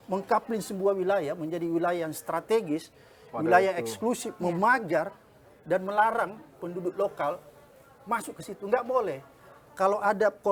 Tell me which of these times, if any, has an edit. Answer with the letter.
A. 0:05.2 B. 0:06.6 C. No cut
C